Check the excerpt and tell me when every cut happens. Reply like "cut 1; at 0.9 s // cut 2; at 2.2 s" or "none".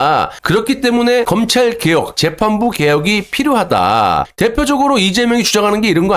cut 1; at 1.3 s // cut 2; at 4.3 s